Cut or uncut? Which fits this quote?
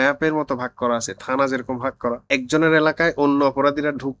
cut